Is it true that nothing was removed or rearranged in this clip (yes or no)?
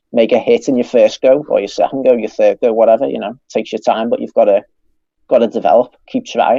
yes